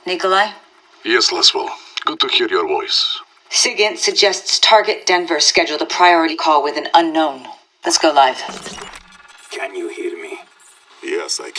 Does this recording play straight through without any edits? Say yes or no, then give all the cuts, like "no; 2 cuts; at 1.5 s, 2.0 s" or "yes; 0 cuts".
no; 1 cut; at 3.3 s